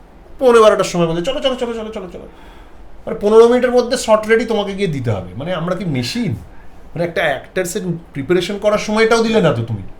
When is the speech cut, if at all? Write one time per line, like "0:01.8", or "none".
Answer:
none

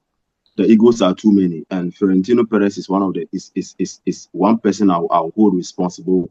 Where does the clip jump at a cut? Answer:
none

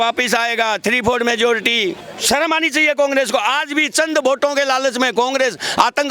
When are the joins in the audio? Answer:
0:02.1

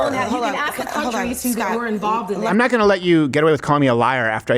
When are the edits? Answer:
0:02.5

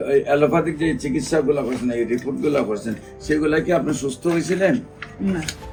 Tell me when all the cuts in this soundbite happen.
none

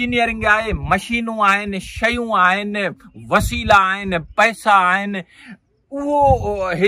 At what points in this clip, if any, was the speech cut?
none

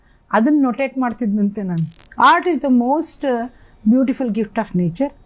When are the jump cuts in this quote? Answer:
0:02.0

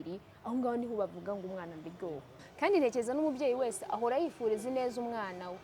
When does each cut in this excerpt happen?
0:02.4

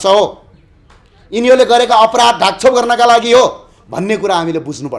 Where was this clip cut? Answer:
none

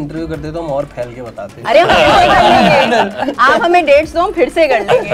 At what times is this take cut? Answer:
none

